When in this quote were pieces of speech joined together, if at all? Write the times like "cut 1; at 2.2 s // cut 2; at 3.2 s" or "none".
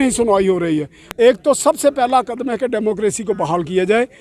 cut 1; at 1.0 s